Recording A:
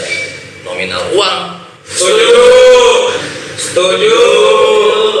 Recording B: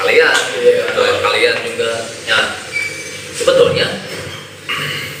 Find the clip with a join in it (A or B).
A